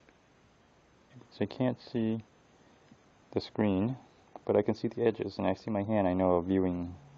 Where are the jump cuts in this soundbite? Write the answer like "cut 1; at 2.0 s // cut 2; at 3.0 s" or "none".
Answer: none